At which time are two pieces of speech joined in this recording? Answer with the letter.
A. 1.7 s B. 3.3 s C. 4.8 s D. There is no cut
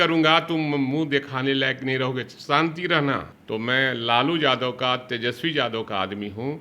B